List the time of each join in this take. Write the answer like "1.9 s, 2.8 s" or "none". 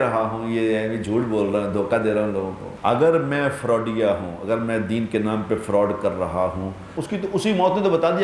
2.6 s, 6.9 s